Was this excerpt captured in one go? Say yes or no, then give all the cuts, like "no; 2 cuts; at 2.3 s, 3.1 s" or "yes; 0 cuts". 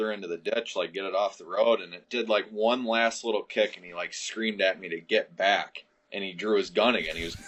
yes; 0 cuts